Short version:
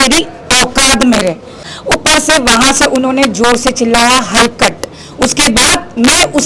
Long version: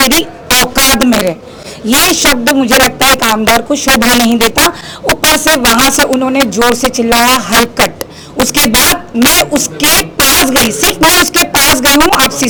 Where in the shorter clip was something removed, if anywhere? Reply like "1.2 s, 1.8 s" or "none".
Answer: 1.7 s